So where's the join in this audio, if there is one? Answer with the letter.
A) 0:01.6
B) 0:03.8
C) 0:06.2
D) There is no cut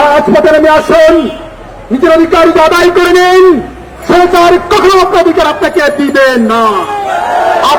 D